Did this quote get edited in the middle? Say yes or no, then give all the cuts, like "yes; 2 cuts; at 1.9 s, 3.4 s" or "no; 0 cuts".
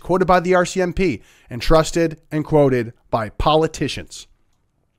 no; 0 cuts